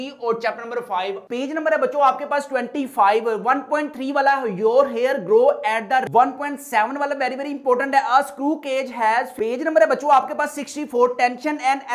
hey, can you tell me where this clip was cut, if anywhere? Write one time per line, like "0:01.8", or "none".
0:01.2
0:06.1
0:09.3

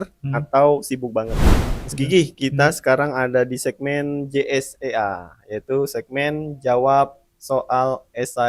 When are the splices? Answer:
0:01.4

